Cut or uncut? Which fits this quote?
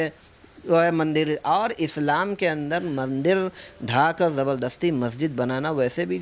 uncut